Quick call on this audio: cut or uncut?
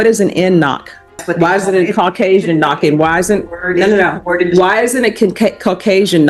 cut